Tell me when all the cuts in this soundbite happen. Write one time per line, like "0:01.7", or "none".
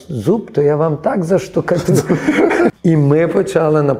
0:02.7